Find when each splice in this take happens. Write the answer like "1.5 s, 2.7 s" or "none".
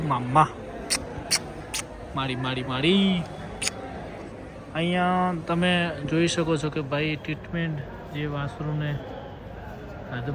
none